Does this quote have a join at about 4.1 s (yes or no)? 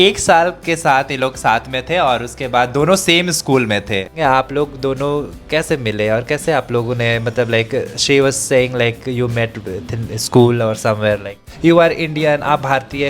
yes